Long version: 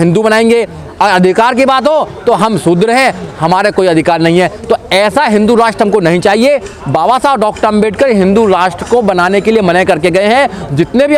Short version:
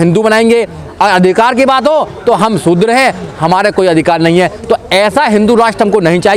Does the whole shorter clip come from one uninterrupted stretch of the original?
yes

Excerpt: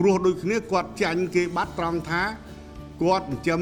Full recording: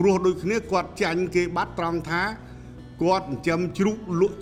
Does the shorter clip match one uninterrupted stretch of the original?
yes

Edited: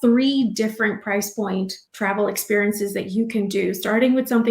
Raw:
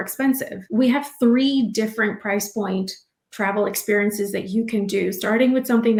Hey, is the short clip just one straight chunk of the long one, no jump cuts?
no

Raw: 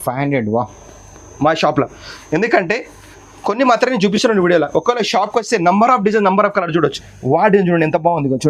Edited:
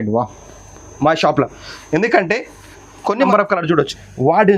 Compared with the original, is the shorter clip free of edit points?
no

